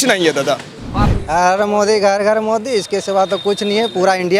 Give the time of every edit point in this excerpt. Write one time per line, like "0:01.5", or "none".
0:01.1